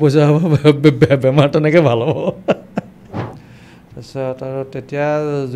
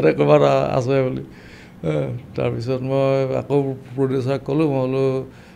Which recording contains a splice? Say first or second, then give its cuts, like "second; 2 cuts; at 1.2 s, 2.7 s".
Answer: first; 1 cut; at 3.4 s